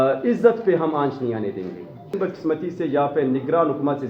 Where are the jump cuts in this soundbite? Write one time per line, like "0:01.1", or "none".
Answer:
0:02.1